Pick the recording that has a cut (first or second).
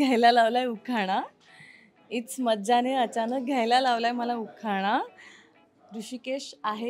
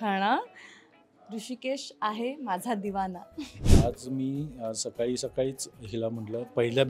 second